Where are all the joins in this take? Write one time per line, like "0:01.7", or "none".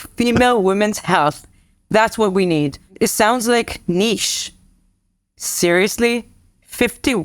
0:02.9